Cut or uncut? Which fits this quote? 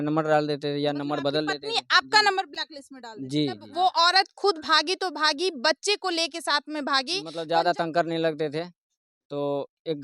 cut